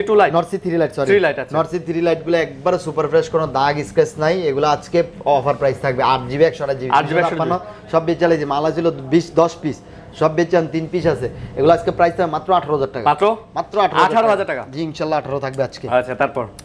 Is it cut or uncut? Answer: uncut